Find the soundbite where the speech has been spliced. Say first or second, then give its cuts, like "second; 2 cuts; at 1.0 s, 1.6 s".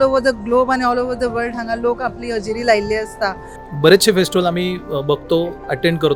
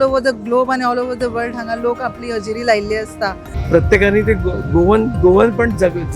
second; 1 cut; at 3.5 s